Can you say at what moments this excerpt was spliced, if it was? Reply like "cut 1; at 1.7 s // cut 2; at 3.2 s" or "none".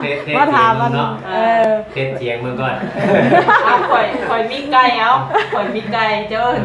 none